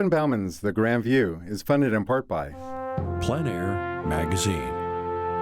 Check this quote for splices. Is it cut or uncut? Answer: cut